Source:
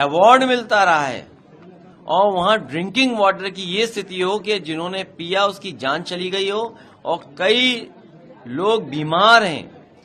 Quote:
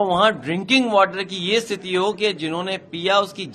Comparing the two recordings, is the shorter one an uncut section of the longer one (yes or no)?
yes